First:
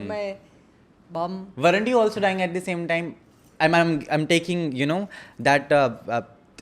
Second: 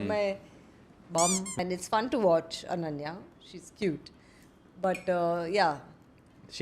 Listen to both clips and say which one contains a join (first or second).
second